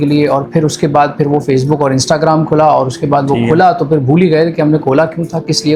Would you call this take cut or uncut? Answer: uncut